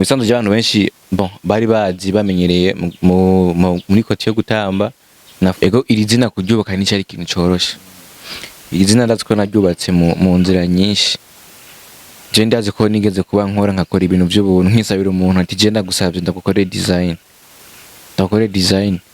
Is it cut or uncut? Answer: cut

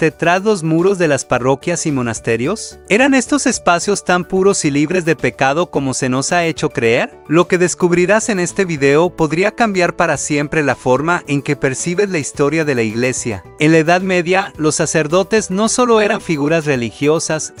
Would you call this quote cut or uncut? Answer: uncut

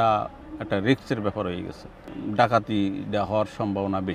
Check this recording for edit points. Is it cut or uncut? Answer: cut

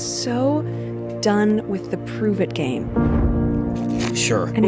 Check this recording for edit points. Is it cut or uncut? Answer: uncut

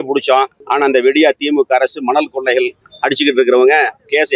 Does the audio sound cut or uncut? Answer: uncut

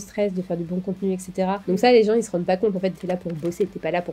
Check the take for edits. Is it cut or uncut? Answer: cut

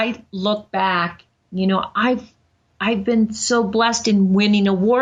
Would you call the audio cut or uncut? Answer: uncut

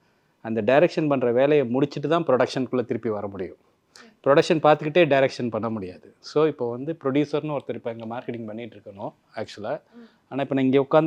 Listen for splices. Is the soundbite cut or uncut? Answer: uncut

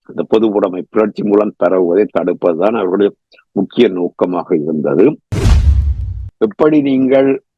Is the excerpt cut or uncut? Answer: cut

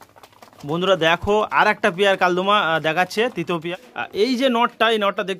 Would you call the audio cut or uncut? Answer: cut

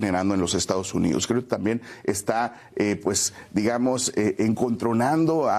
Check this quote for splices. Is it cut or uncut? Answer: uncut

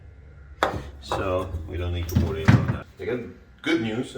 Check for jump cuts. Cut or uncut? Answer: cut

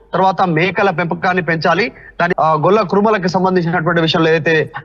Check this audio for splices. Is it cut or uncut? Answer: cut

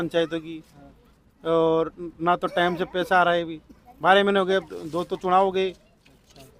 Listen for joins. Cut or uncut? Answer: uncut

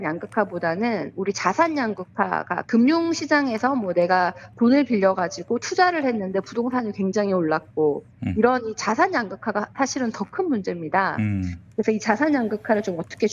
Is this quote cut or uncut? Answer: uncut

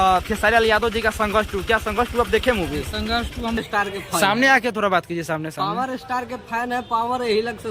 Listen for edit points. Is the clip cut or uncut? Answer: cut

